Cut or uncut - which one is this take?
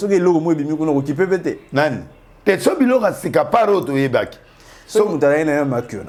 uncut